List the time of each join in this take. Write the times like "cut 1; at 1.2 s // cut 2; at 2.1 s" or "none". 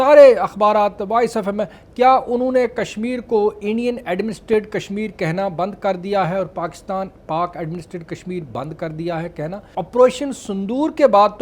cut 1; at 9.7 s